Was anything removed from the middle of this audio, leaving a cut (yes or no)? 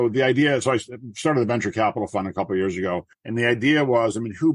yes